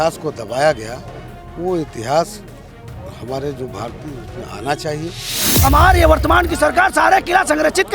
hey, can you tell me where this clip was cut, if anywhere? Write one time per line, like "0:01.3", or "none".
0:05.5